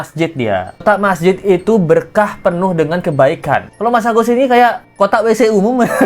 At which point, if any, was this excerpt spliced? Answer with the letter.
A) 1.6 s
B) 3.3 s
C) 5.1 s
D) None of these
D